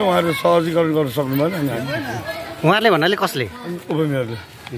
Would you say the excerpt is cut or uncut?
uncut